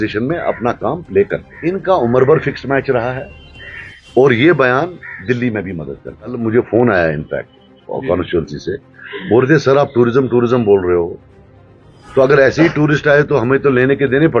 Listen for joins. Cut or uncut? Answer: cut